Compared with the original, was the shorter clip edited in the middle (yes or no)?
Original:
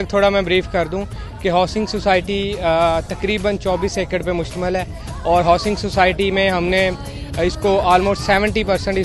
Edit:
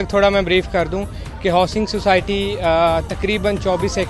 no